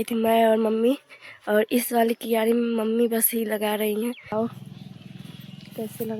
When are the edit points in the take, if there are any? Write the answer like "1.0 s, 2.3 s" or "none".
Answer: 4.3 s